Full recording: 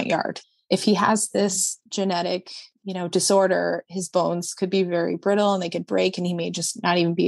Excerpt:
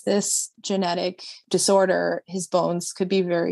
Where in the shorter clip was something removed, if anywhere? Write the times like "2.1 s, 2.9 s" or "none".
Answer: 1.4 s